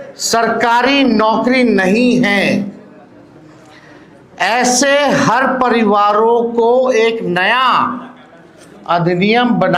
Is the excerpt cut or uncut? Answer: uncut